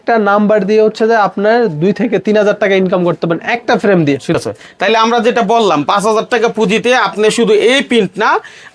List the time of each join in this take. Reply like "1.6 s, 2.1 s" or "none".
4.4 s